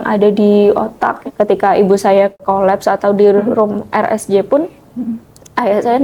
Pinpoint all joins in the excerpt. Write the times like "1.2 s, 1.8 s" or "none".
1.1 s, 2.4 s